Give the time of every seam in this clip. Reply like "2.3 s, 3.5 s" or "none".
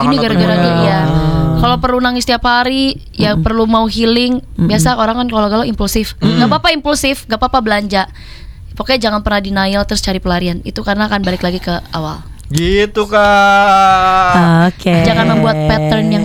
none